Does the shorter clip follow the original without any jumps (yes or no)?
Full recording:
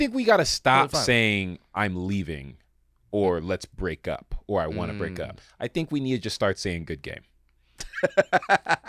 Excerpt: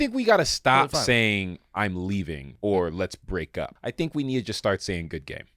no